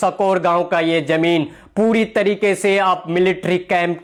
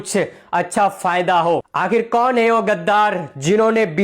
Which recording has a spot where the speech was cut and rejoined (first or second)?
second